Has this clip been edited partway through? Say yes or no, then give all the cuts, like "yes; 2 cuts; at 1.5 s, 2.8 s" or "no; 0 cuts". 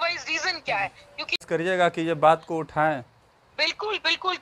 yes; 1 cut; at 1.4 s